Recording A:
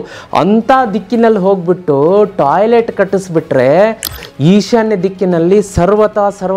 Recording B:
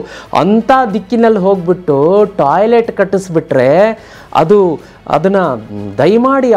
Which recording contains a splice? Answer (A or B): A